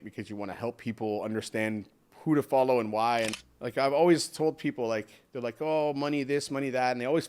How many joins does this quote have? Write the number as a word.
one